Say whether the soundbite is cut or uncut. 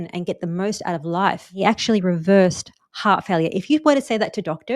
cut